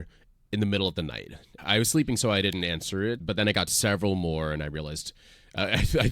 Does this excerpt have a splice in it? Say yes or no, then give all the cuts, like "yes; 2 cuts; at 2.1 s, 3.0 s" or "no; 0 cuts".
yes; 1 cut; at 1.5 s